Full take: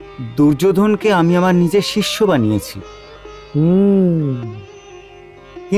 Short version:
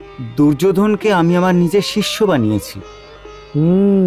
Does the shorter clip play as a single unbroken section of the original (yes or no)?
yes